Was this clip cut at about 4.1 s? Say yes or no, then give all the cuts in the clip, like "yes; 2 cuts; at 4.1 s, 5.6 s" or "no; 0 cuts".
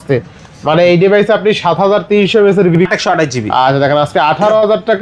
no; 1 cut; at 2.8 s